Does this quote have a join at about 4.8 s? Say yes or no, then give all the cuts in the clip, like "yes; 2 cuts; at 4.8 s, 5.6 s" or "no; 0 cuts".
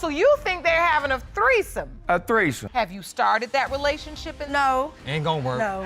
no; 1 cut; at 2.6 s